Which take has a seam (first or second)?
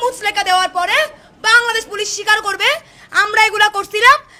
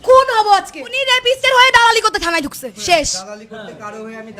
second